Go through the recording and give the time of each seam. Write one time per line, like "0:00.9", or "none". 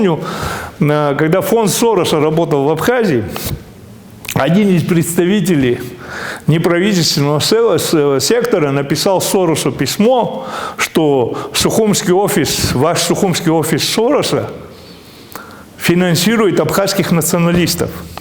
none